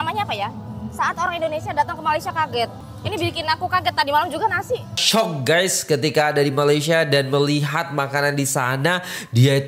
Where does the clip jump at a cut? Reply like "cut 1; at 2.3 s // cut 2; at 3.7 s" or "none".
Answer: cut 1; at 2.9 s // cut 2; at 5.0 s